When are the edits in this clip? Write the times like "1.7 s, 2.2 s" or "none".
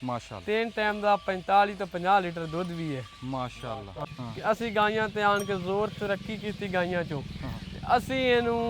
4.0 s